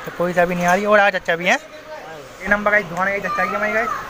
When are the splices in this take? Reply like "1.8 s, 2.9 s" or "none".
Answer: 2.5 s

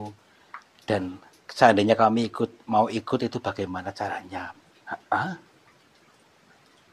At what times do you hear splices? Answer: 4.6 s

